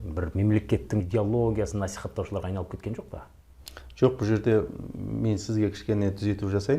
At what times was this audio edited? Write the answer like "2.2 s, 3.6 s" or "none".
1.1 s